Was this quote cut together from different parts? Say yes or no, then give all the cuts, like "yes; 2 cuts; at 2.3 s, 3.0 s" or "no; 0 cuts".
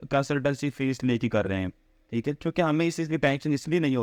no; 0 cuts